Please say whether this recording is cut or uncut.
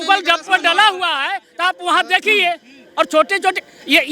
uncut